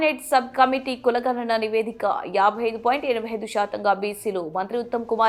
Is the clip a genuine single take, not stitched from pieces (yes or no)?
yes